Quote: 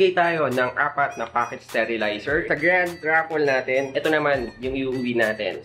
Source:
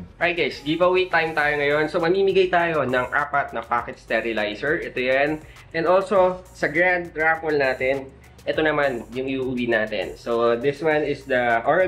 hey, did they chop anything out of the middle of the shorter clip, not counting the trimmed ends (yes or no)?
yes